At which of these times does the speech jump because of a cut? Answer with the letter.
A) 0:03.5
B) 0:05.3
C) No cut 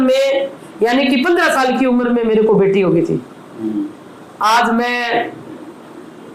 C